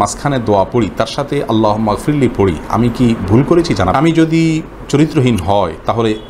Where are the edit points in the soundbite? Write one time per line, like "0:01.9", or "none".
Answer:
0:03.9